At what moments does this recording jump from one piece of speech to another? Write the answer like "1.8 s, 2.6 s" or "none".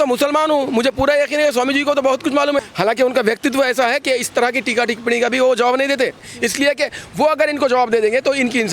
2.6 s, 6.4 s